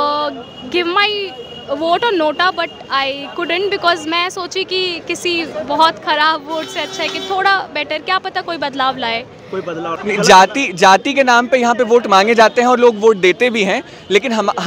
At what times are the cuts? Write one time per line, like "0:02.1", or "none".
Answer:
0:09.9